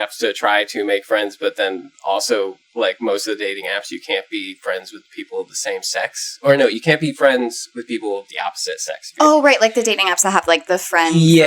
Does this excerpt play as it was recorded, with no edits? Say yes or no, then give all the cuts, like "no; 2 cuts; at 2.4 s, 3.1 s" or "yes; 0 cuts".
yes; 0 cuts